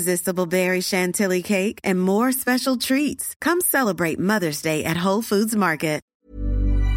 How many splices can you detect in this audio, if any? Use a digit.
1